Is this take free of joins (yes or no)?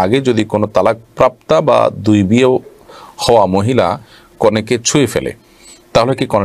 yes